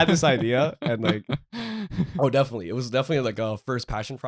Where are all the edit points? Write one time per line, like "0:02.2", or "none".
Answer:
0:02.1